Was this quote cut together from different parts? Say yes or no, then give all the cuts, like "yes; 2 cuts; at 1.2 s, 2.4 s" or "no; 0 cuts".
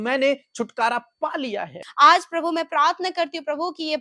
yes; 1 cut; at 1.8 s